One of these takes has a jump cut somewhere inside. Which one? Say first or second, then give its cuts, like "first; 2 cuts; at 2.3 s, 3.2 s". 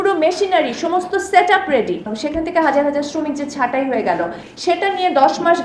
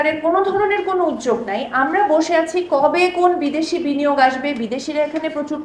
first; 1 cut; at 2.2 s